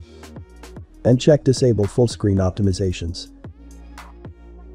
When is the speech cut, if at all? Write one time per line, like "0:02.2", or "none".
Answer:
0:00.9